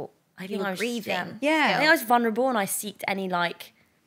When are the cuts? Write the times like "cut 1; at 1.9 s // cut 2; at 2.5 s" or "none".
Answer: cut 1; at 1.3 s